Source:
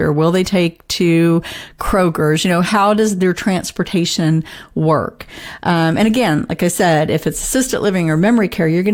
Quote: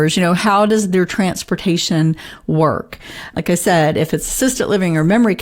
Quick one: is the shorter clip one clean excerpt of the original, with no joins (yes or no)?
no